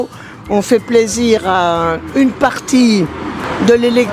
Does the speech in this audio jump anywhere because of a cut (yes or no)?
no